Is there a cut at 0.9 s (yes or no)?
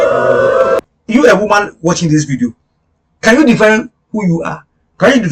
yes